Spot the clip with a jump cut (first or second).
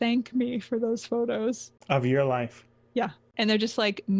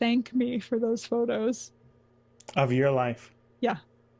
first